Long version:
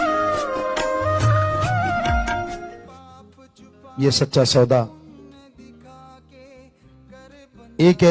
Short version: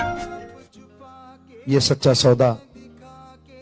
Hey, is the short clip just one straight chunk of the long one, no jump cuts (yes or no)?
no